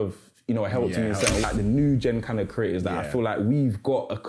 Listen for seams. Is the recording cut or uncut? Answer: cut